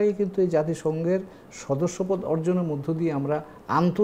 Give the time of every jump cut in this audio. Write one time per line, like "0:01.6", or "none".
none